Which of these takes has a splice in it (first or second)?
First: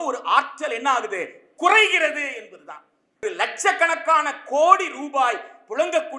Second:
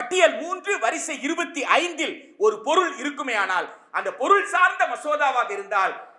first